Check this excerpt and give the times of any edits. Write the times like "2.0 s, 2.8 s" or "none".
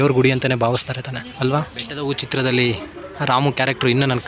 1.9 s